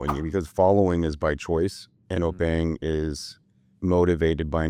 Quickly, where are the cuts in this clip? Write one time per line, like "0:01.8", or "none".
none